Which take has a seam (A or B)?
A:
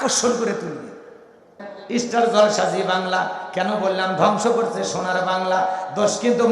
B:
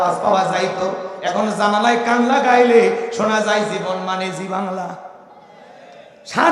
A